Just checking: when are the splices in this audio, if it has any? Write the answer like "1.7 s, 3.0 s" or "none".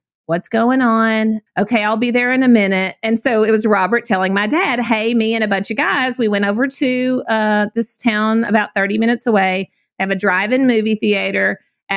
1.4 s

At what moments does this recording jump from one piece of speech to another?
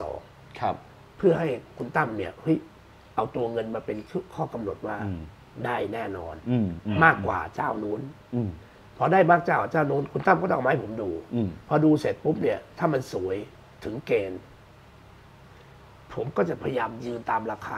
none

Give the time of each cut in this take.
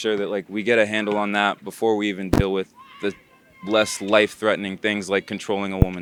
none

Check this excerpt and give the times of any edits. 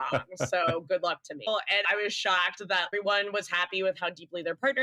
1.5 s, 2.9 s

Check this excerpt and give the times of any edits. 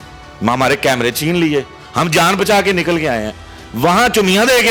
none

